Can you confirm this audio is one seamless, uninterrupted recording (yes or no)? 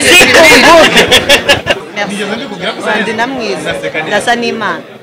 no